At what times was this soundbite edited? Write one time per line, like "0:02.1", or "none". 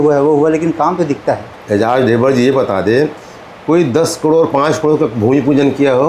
0:01.5